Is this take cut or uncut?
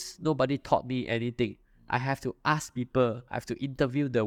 uncut